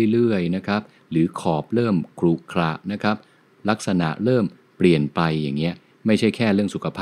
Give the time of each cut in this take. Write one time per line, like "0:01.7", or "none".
none